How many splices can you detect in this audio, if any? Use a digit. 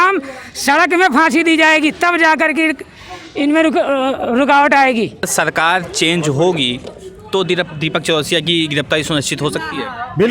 1